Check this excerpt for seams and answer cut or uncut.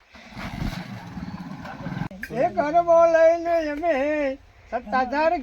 cut